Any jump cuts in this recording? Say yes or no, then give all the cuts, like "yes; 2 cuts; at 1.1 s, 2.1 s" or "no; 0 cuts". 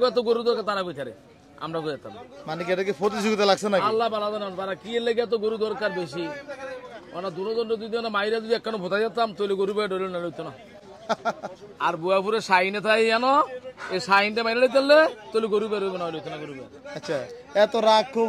no; 0 cuts